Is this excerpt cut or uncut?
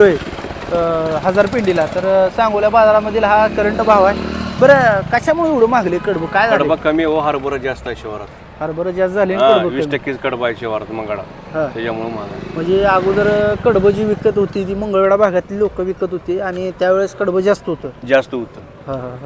uncut